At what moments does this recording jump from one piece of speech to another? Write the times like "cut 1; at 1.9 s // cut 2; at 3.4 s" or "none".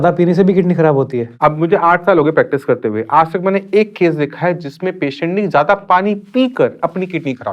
cut 1; at 1.2 s